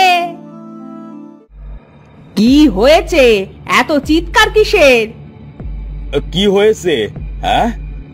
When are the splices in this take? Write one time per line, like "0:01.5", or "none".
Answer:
0:01.4